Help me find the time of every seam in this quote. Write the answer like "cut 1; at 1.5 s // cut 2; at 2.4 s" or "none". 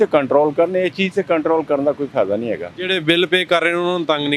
none